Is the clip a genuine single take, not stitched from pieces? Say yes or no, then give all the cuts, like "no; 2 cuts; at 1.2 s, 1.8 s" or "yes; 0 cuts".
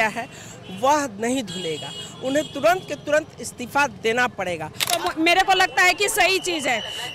no; 1 cut; at 4.9 s